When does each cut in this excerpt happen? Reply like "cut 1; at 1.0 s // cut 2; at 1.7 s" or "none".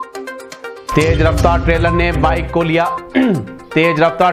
none